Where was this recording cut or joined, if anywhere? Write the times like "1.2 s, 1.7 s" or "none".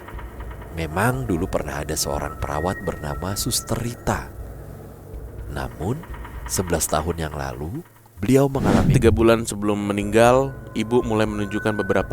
8.9 s